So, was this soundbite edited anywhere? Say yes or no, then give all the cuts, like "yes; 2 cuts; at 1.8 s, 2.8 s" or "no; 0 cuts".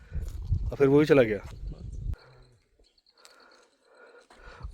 yes; 1 cut; at 2.2 s